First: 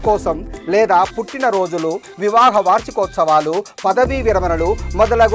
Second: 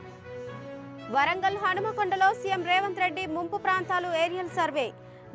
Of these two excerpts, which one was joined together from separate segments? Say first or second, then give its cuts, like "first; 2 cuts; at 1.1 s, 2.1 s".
second; 1 cut; at 0.9 s